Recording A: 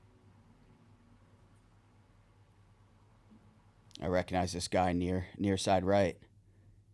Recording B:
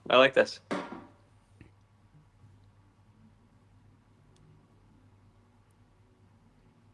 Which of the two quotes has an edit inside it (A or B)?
B